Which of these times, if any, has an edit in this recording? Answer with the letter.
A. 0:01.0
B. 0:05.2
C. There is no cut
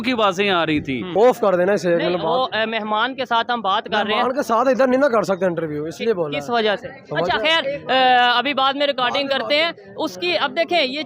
A